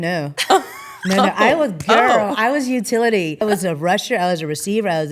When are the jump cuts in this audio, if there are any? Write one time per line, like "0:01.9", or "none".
0:03.4